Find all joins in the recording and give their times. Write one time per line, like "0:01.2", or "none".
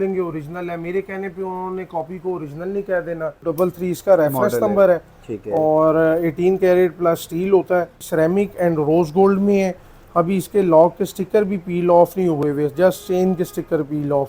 0:03.5
0:08.0